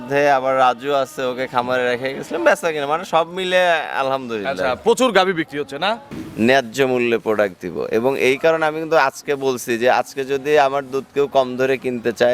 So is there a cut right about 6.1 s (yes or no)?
yes